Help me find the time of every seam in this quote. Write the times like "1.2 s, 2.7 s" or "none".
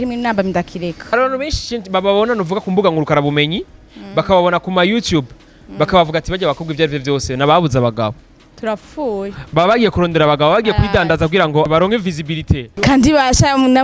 1.0 s, 11.7 s, 12.7 s